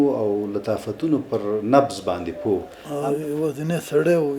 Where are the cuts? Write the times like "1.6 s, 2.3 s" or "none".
2.8 s